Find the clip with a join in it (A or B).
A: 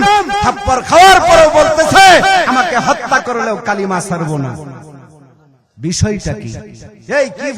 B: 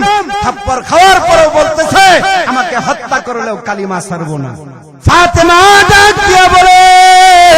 B